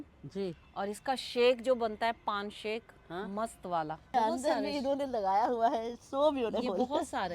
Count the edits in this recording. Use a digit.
1